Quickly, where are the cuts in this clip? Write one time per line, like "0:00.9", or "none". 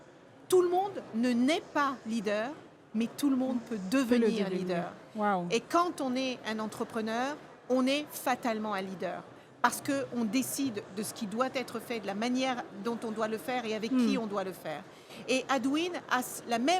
none

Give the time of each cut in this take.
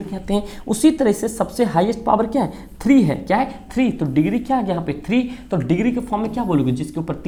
none

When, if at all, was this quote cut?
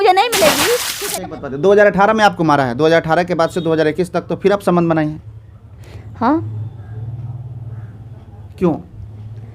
0:00.9

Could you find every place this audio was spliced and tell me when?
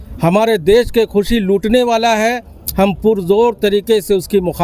none

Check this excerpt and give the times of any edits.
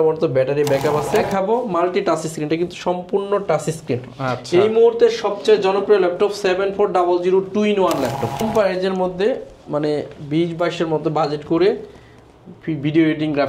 0:01.3
0:08.4

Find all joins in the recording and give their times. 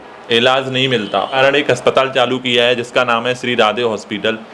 0:01.4

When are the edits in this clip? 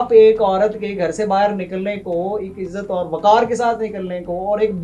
none

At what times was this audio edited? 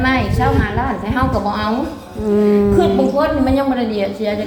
none

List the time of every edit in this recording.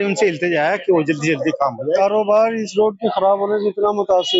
0:01.9

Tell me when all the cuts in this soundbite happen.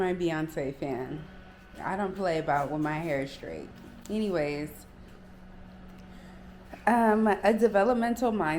none

